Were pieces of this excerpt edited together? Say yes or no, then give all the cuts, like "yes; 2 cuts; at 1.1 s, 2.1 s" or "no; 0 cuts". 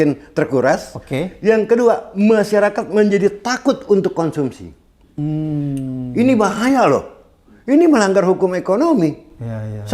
no; 0 cuts